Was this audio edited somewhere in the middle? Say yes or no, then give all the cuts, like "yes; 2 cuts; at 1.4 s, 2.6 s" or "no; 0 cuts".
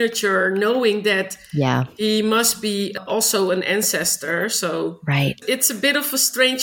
no; 0 cuts